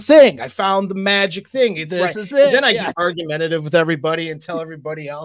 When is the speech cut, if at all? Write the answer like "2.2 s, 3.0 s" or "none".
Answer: none

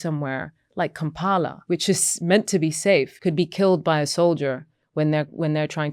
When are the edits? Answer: 1.6 s, 3.1 s

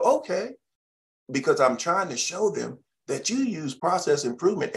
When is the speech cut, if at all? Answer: 3.7 s

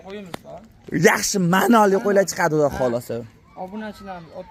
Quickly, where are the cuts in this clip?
none

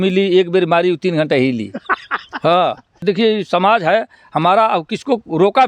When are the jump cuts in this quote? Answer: 3.0 s

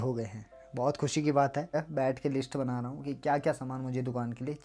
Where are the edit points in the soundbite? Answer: 1.7 s

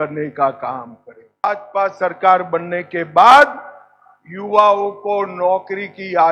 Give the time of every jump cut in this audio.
1.4 s

